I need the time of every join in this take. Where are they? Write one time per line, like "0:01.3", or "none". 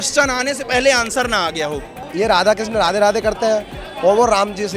0:02.1